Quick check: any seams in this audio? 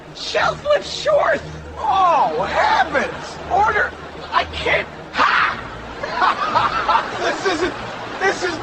no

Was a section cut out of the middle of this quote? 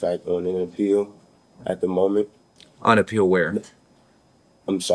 no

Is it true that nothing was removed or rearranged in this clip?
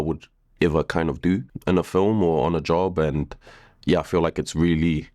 no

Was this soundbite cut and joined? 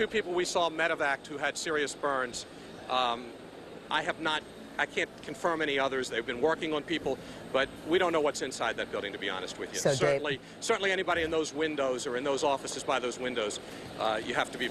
no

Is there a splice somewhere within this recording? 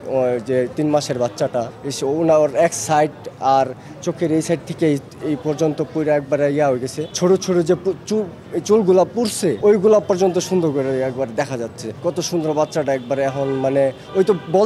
yes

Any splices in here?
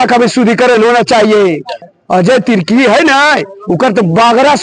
yes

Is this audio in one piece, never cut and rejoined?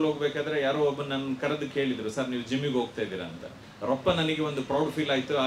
yes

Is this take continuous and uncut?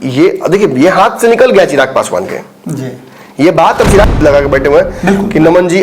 no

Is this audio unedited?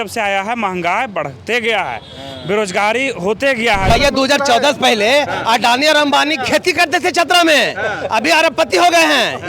no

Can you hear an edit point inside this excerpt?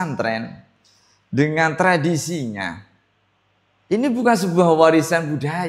no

